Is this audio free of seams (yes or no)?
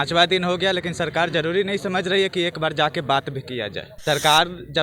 no